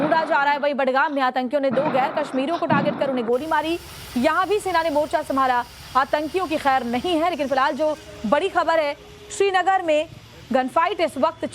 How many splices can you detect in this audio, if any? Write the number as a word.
one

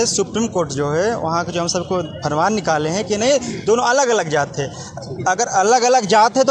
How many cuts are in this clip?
zero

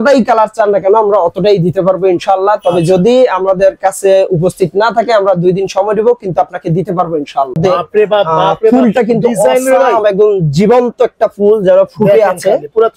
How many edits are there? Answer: one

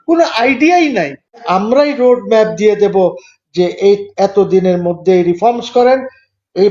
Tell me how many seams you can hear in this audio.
one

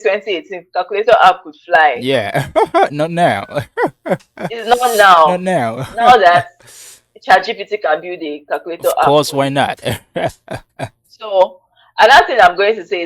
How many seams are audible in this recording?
zero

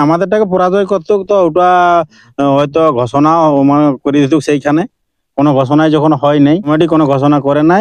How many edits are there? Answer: one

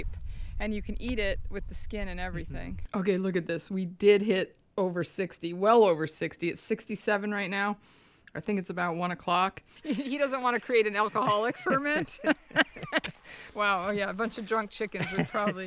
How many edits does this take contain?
two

